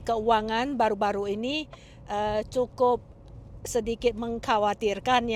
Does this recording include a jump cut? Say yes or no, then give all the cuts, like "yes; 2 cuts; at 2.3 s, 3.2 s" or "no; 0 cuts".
no; 0 cuts